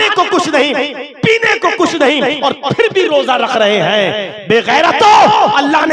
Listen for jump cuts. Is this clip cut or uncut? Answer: uncut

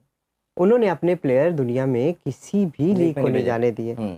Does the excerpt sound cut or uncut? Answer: uncut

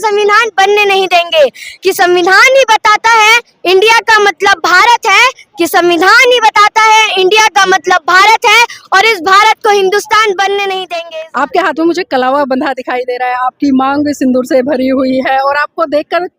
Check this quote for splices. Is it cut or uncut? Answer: cut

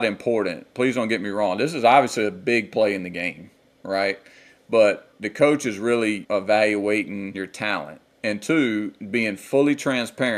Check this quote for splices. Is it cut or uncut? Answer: cut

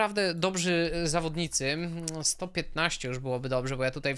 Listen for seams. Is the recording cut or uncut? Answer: uncut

